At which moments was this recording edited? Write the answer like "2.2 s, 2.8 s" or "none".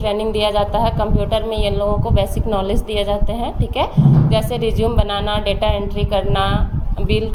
none